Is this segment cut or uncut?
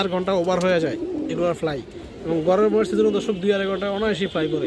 uncut